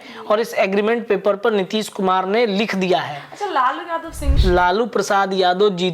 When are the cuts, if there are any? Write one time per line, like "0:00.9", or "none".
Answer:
0:04.4